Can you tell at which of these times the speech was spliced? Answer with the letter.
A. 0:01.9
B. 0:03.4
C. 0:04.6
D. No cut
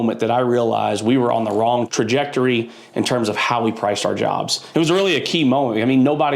A